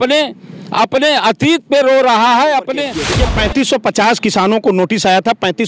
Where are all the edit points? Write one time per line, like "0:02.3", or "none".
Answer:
0:03.0